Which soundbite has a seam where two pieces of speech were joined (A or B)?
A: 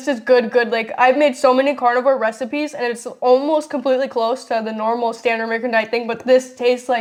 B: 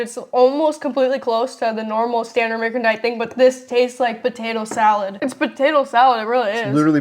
B